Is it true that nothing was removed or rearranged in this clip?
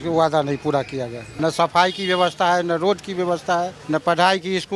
no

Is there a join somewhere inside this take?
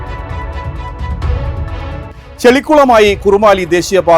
yes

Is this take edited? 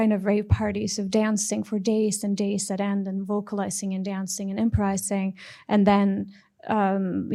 no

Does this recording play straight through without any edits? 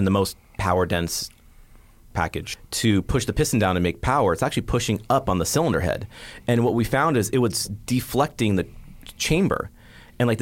no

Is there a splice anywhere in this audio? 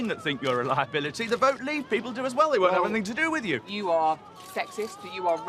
yes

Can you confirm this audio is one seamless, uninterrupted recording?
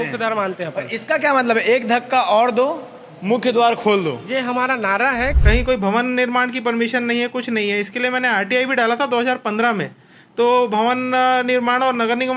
no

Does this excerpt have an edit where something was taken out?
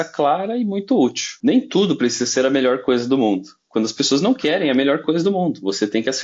yes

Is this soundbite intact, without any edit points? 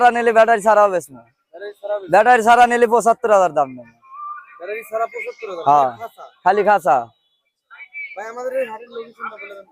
yes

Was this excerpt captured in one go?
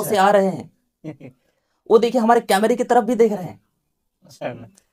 yes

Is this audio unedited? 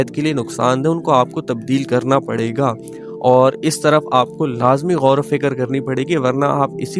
yes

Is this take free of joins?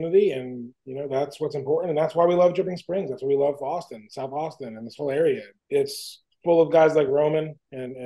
no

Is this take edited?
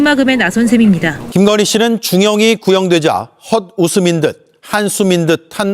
yes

